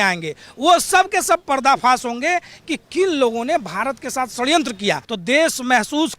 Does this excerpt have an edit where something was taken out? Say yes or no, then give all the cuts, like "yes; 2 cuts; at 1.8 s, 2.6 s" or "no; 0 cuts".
yes; 1 cut; at 5.1 s